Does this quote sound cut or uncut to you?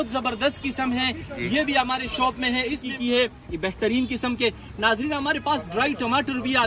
cut